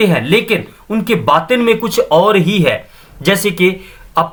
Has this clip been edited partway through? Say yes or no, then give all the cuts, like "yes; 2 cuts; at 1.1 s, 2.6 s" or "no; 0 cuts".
no; 0 cuts